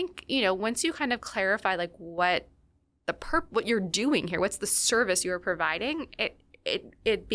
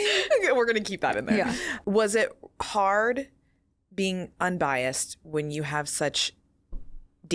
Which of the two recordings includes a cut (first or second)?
second